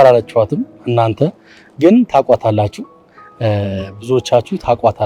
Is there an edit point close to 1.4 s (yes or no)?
no